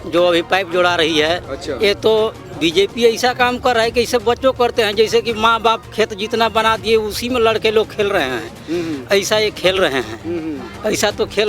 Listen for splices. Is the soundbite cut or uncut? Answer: uncut